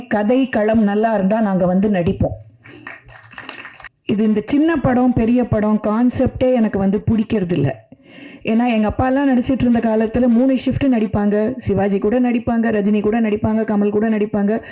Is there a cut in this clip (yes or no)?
yes